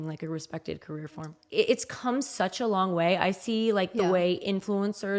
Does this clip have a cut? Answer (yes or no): yes